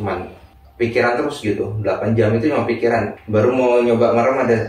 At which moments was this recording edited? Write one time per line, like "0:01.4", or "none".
0:03.2